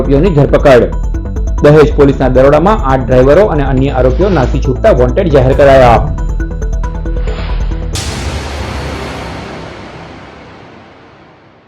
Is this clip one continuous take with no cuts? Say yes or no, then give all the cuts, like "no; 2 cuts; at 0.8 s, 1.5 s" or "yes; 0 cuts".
no; 1 cut; at 7.8 s